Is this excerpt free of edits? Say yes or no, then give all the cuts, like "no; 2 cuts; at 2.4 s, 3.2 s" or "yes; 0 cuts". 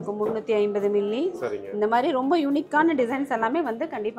yes; 0 cuts